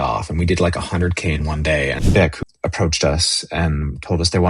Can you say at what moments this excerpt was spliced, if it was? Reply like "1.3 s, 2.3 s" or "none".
2.2 s